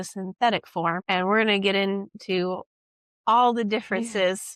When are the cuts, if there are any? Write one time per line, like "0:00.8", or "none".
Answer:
0:01.0